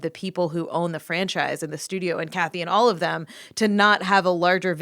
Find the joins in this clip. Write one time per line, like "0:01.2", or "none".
0:02.3